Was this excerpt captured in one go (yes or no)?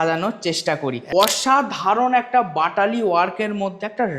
no